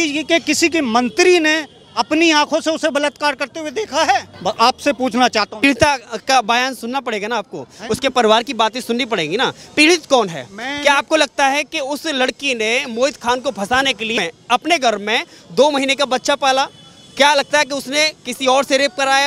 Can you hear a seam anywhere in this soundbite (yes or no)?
no